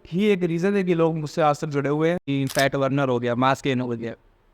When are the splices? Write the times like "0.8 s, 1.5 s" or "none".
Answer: 2.3 s